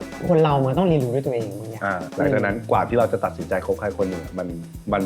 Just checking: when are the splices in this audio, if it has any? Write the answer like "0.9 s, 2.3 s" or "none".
2.0 s